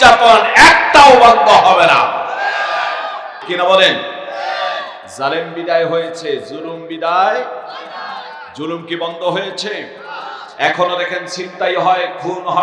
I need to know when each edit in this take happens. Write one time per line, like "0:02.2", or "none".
0:03.4